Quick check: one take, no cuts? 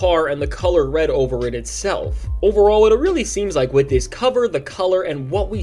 yes; 0 cuts

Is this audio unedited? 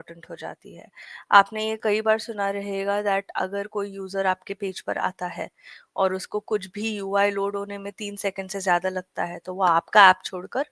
yes; 0 cuts

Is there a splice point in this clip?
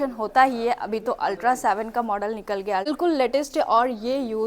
yes; 1 cut; at 2.9 s

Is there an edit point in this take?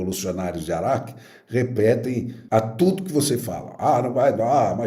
yes; 1 cut; at 2.3 s

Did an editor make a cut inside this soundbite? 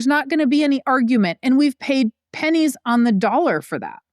yes; 1 cut; at 2.3 s

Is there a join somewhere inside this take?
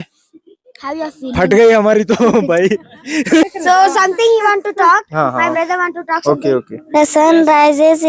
yes; 1 cut; at 3.4 s

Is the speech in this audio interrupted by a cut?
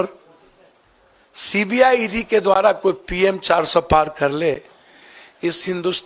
no; 0 cuts

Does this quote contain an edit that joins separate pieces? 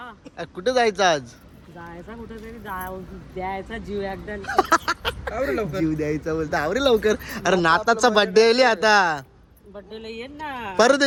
no; 0 cuts

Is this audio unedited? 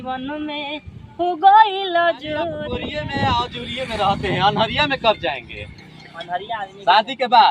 no; 1 cut; at 2.6 s

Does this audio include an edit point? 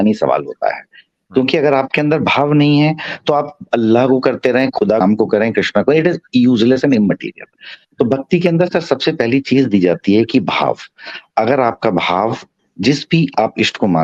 no; 0 cuts

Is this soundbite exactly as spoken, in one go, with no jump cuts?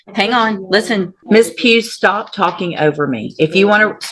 no; 1 cut; at 1.2 s

